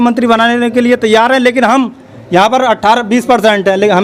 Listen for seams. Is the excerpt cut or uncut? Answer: uncut